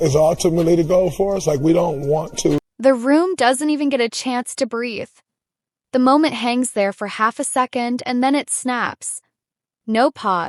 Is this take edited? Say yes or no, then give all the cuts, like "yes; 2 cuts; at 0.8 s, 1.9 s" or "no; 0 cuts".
no; 0 cuts